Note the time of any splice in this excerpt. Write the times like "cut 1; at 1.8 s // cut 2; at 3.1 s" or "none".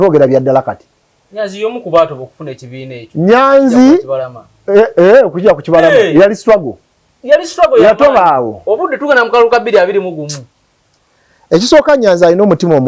none